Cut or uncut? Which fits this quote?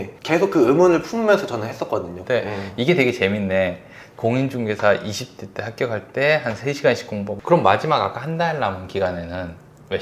cut